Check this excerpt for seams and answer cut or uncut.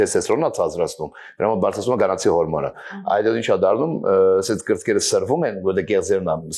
uncut